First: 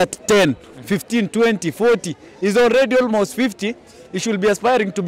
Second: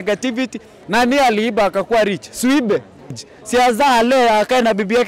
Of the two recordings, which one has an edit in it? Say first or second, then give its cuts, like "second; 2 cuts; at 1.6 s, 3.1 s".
second; 1 cut; at 3.3 s